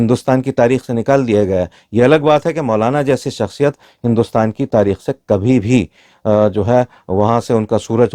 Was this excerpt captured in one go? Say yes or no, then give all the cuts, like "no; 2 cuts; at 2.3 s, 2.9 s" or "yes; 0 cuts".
yes; 0 cuts